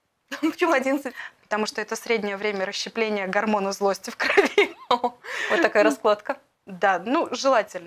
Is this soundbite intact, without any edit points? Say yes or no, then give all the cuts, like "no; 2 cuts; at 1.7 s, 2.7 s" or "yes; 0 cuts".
yes; 0 cuts